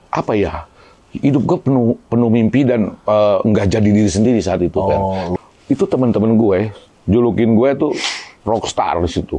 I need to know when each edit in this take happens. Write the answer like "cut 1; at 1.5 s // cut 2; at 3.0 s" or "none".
cut 1; at 5.3 s

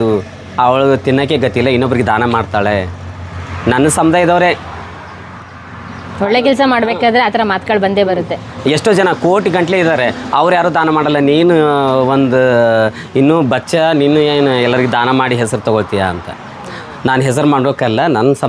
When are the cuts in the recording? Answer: none

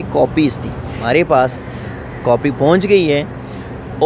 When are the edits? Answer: cut 1; at 1.0 s

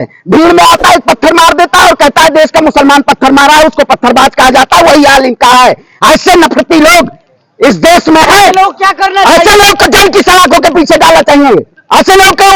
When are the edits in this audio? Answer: none

